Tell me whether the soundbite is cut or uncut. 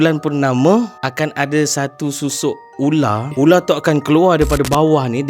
cut